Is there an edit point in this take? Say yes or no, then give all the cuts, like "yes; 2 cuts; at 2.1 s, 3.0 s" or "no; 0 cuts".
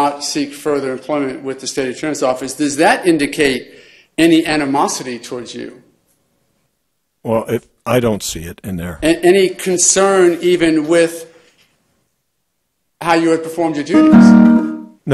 yes; 1 cut; at 11.2 s